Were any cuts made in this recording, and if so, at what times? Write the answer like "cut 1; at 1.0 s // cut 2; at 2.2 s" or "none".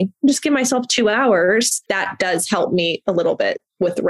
cut 1; at 1.8 s